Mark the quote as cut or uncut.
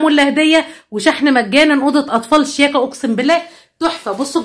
uncut